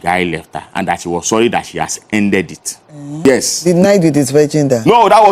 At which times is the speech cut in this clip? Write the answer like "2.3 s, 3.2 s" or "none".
3.3 s